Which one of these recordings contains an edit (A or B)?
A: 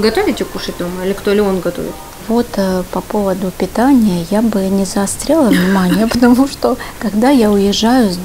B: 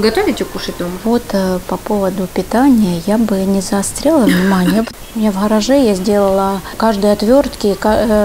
B